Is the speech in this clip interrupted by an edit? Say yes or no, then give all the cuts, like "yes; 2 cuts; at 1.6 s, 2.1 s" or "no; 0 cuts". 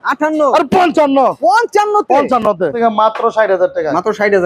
yes; 1 cut; at 2.7 s